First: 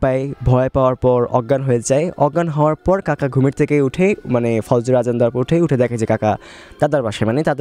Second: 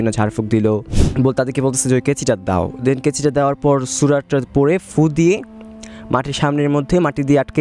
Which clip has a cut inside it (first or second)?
second